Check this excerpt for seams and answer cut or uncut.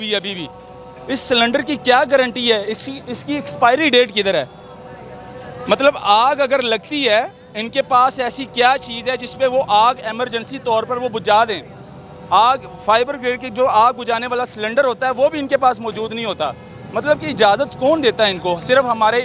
uncut